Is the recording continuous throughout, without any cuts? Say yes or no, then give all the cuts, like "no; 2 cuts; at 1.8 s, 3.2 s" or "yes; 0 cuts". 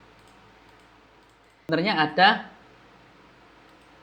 no; 1 cut; at 1.6 s